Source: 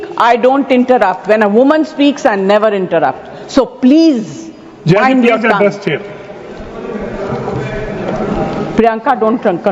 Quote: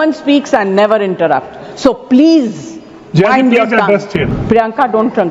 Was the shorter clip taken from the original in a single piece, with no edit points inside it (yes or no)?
no